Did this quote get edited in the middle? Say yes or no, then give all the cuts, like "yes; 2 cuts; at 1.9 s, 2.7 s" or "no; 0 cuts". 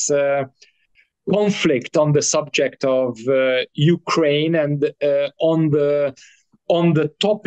no; 0 cuts